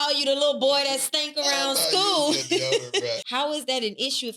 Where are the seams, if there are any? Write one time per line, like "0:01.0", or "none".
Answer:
0:03.2

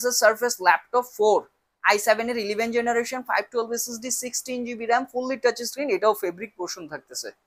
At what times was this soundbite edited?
none

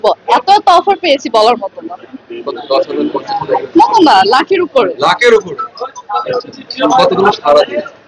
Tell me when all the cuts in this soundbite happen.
none

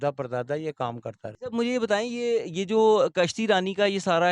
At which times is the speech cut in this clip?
0:01.3

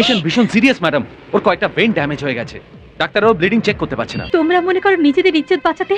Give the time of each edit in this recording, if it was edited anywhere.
0:04.2

